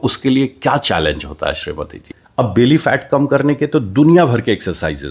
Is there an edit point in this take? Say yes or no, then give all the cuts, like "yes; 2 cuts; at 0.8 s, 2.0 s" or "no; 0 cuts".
yes; 1 cut; at 2.0 s